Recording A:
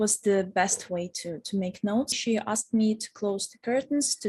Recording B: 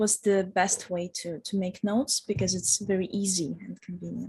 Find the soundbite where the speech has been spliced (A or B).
A